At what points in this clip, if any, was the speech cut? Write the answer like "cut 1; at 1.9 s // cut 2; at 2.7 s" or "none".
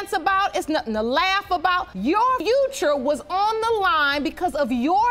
cut 1; at 2.4 s